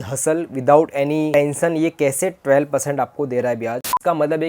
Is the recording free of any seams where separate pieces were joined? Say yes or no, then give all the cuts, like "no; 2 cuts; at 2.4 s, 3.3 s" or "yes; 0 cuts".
no; 2 cuts; at 1.3 s, 3.8 s